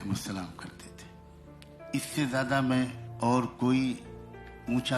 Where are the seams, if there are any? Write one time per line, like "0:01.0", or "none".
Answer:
0:00.7
0:01.9
0:03.0